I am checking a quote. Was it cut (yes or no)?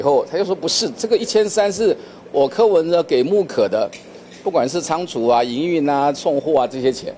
no